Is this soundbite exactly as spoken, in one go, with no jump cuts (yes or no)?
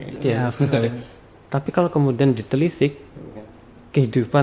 yes